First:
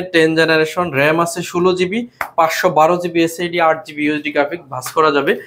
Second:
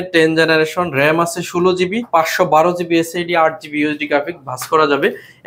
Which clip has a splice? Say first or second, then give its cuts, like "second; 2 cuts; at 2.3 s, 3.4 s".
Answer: second; 1 cut; at 2.0 s